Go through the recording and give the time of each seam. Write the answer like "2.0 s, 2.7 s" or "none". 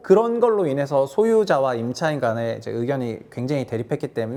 none

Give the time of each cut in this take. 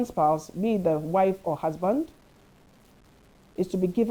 none

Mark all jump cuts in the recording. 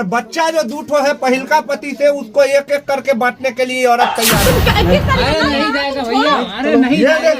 4.4 s

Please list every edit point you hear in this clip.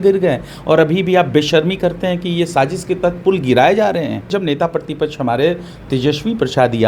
4.3 s

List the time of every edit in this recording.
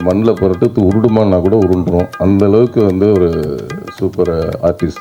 none

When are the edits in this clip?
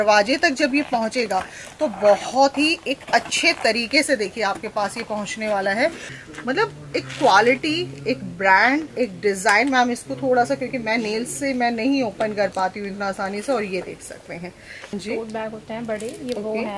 6.1 s, 14.9 s

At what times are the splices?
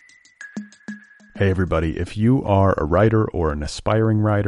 0.9 s

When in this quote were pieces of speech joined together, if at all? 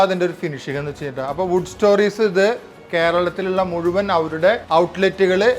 4.6 s

